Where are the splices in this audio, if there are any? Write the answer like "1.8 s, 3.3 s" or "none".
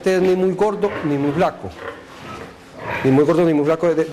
3.1 s